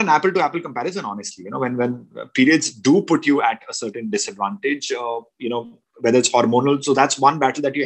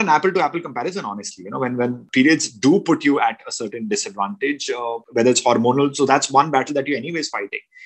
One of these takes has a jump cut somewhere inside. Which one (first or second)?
second